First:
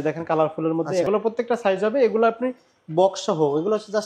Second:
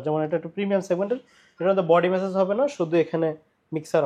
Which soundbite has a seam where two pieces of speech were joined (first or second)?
first